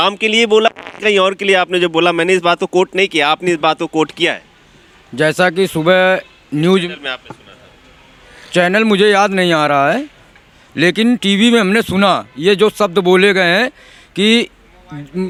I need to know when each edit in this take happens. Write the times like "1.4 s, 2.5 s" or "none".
none